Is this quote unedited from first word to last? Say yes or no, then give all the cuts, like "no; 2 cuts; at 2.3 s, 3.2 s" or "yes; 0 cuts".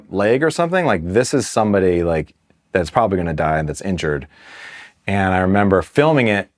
yes; 0 cuts